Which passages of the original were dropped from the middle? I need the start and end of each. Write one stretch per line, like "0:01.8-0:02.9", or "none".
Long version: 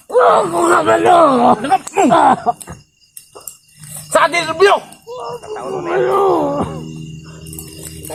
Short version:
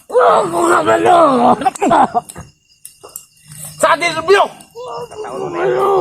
0:02.0-0:02.3